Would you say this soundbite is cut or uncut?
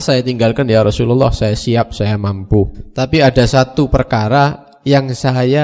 cut